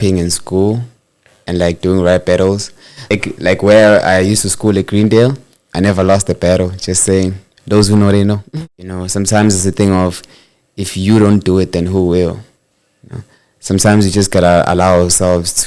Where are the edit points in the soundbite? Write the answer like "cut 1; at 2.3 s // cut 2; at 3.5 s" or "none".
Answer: cut 1; at 3.0 s // cut 2; at 8.4 s